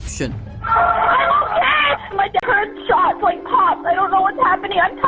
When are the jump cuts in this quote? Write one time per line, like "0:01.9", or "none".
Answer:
0:02.4